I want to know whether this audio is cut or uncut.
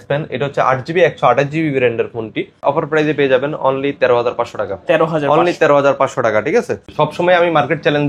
cut